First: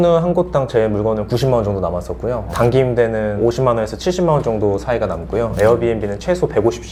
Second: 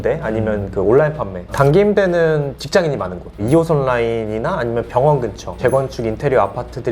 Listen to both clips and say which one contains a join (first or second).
second